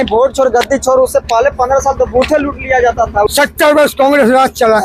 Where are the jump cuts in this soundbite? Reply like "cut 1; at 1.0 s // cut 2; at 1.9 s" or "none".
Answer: cut 1; at 3.3 s